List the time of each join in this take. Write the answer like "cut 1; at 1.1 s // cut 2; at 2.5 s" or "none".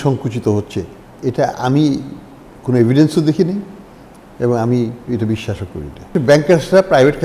cut 1; at 1.0 s // cut 2; at 6.1 s